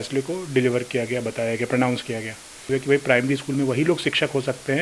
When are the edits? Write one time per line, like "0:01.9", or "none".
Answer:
0:02.7